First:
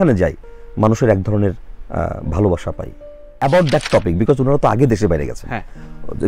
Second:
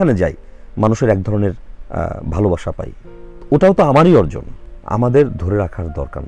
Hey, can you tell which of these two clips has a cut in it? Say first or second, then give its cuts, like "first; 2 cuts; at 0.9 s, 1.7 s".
first; 1 cut; at 3.4 s